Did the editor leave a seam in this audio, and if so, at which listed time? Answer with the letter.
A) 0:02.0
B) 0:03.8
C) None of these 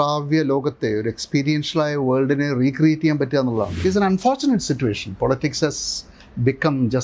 B